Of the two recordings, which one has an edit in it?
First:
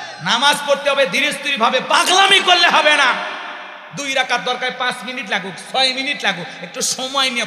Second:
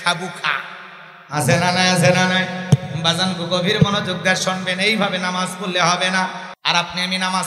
second; 1 cut; at 6.4 s

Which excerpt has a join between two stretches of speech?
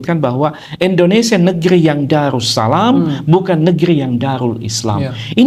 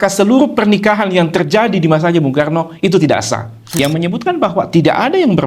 second; 1 cut; at 3.6 s

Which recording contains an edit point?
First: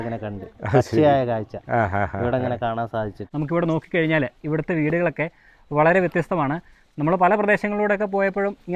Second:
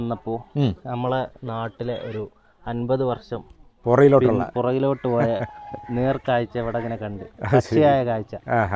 first; 1 cut; at 3.2 s

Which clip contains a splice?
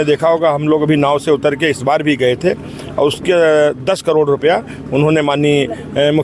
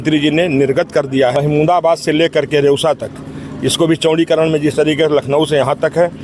second; 1 cut; at 1.4 s

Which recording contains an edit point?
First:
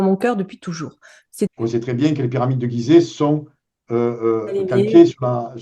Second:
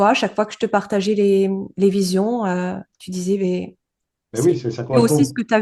first; 1 cut; at 1.5 s

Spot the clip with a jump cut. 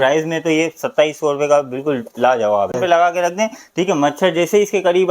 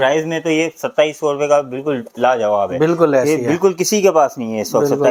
first; 1 cut; at 2.8 s

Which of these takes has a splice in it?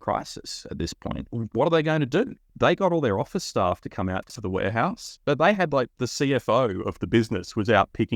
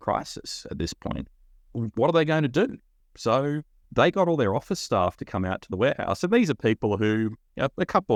first; 3 cuts; at 1.3 s, 2.4 s, 4.4 s

